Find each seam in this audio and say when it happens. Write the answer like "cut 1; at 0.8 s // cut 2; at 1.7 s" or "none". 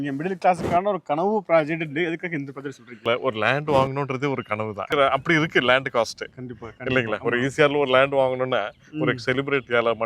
cut 1; at 3.0 s // cut 2; at 4.9 s